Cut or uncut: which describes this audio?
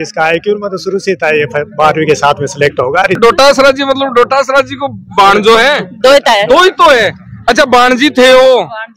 cut